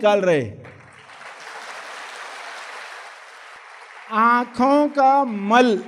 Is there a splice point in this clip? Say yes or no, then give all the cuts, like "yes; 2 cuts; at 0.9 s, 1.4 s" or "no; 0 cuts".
yes; 1 cut; at 3.5 s